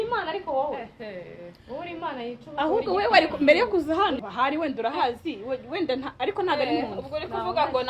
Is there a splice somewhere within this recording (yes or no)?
yes